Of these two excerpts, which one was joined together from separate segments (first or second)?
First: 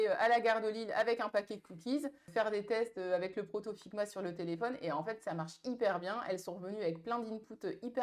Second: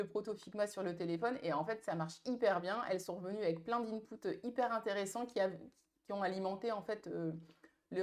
first